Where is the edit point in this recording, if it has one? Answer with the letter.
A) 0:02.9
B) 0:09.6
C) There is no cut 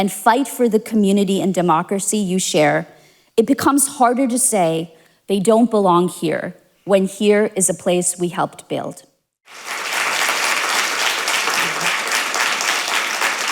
B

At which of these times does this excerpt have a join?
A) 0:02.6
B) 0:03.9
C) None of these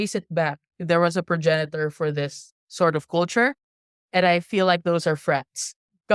C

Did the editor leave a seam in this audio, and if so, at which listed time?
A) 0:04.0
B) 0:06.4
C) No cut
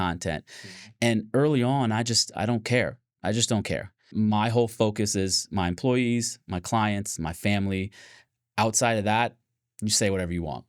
A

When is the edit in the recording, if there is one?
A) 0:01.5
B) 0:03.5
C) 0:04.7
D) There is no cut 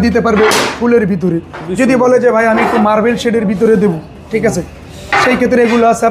D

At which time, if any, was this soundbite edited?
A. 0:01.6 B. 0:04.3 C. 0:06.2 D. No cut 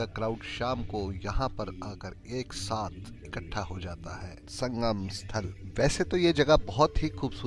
D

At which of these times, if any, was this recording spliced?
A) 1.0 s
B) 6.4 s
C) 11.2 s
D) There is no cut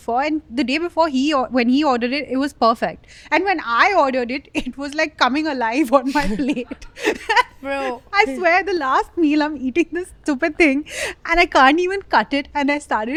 D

